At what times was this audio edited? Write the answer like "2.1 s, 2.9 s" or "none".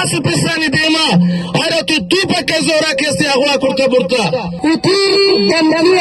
4.5 s